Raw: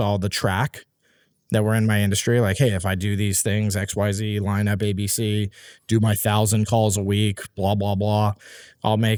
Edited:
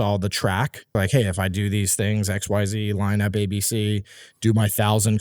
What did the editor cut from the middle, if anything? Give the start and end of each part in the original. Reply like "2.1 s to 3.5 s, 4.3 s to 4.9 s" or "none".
1.0 s to 2.4 s